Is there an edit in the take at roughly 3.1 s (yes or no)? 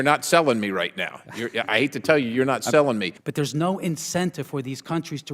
yes